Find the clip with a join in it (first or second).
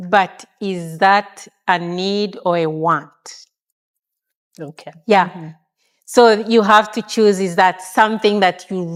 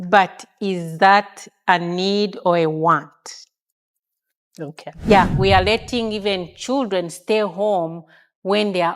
second